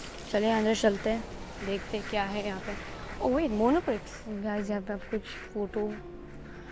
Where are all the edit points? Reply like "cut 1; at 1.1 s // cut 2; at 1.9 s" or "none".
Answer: cut 1; at 4.6 s